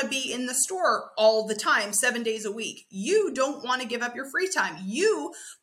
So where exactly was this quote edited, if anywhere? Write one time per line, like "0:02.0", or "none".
none